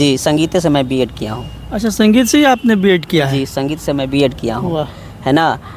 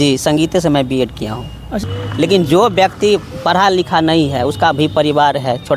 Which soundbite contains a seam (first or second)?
second